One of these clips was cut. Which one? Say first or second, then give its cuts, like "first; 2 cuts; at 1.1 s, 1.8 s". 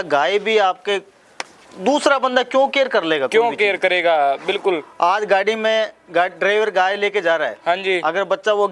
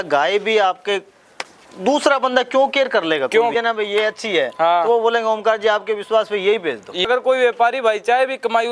second; 2 cuts; at 3.5 s, 7.1 s